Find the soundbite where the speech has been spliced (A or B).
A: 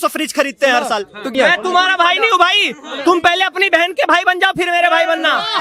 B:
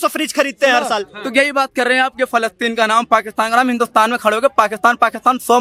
A